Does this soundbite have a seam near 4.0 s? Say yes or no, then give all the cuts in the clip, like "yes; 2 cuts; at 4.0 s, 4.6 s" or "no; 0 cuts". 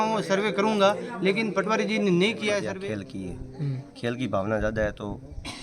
no; 1 cut; at 2.7 s